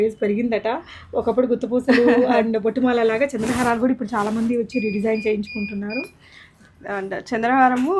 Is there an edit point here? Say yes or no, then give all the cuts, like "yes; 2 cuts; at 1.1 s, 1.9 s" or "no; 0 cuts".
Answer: no; 0 cuts